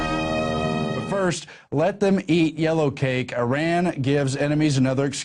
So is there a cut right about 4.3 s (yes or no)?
no